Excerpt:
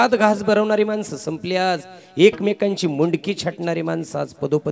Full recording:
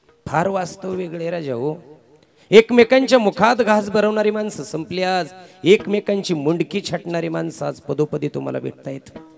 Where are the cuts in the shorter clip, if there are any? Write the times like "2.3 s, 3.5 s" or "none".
none